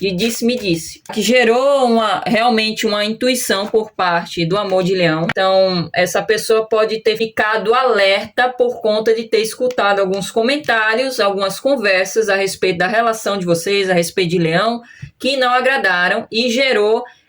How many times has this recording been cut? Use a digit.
3